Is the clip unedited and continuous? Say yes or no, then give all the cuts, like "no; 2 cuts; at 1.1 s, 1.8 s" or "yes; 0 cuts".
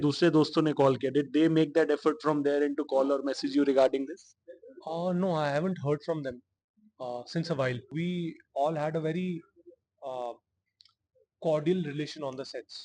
no; 1 cut; at 7.9 s